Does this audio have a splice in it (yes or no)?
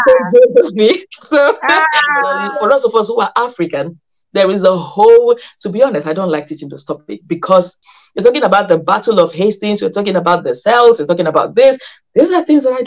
yes